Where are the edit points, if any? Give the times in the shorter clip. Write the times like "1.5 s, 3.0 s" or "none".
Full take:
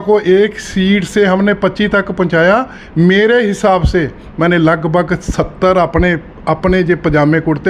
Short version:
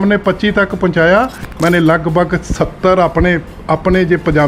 1.4 s

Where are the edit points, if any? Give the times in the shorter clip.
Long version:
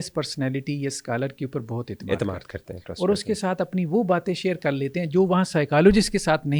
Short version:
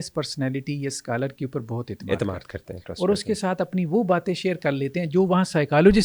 none

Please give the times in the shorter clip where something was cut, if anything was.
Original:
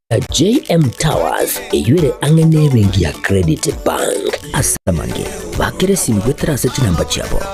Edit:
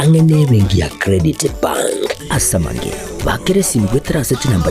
2.5 s

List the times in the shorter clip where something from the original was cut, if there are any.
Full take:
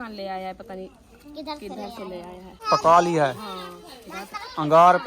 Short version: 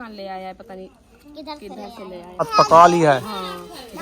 2.4 s

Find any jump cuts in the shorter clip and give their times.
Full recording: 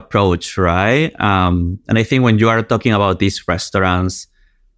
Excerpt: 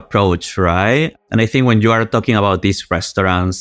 1.2 s

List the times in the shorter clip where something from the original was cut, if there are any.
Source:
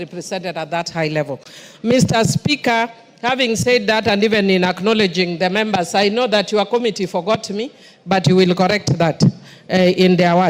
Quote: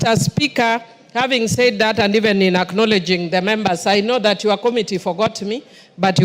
none

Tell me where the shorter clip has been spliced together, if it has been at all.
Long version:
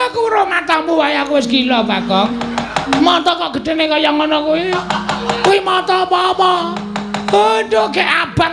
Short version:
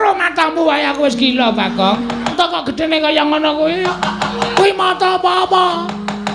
2.3 s

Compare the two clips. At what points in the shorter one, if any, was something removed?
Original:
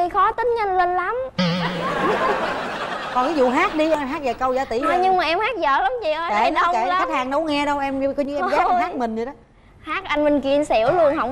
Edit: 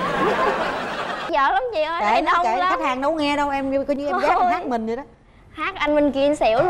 1.2 s

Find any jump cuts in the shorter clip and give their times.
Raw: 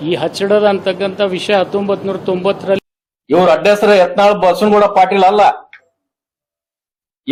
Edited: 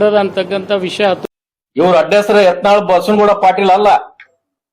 1.3 s

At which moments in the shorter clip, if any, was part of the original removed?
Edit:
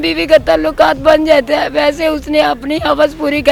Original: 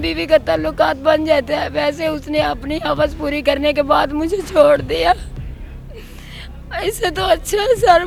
none

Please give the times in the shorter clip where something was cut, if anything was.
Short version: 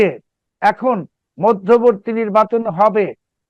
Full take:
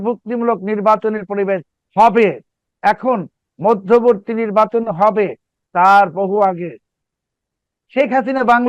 none

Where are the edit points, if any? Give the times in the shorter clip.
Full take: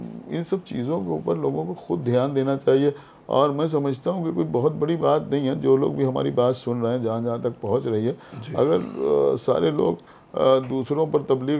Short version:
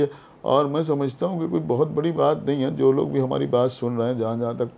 none

